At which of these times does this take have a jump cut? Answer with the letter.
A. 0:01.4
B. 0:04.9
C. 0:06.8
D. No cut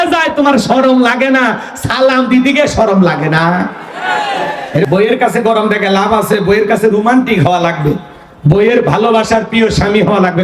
B